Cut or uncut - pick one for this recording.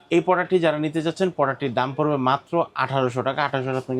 uncut